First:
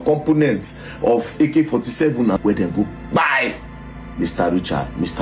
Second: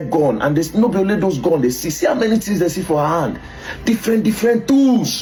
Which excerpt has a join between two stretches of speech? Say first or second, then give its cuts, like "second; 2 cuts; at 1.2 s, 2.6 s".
first; 1 cut; at 2.4 s